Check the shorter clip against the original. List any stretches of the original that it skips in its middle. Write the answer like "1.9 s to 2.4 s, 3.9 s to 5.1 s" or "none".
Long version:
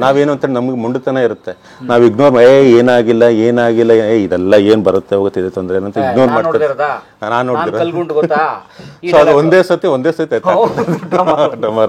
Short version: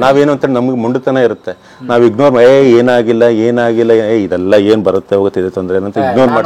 none